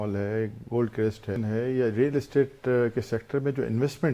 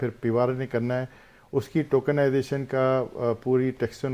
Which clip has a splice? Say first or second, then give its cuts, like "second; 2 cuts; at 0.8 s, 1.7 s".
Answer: first; 1 cut; at 1.3 s